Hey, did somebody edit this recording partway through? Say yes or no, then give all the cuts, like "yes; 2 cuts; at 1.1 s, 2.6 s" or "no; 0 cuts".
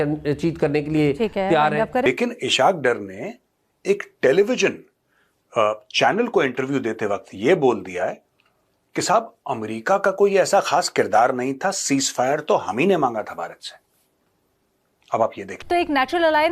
yes; 2 cuts; at 2.1 s, 15.6 s